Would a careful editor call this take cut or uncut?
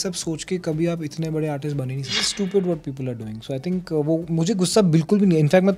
cut